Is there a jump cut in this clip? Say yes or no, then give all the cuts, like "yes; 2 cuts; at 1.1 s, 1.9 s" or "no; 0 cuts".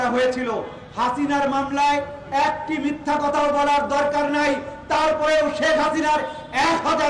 no; 0 cuts